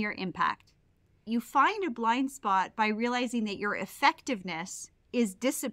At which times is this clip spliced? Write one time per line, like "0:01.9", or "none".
0:01.2